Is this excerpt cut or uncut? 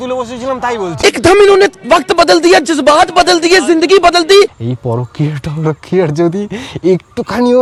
uncut